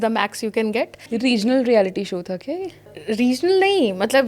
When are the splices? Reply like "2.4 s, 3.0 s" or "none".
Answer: 1.3 s, 2.9 s